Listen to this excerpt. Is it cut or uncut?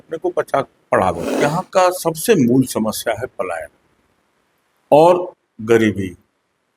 cut